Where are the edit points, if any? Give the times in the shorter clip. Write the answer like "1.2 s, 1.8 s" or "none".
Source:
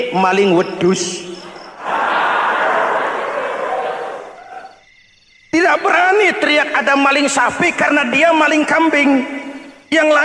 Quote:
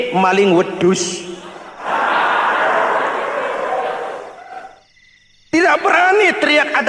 none